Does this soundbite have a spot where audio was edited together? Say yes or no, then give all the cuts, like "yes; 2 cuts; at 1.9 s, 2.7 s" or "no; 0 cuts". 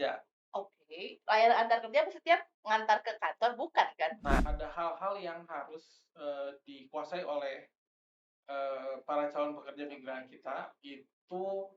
yes; 1 cut; at 4.5 s